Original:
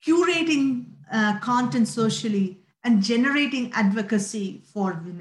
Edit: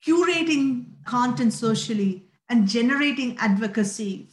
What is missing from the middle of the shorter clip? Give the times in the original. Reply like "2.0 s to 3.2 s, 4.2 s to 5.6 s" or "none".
1.0 s to 1.4 s